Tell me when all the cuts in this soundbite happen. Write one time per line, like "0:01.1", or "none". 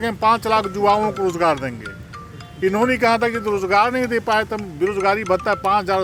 none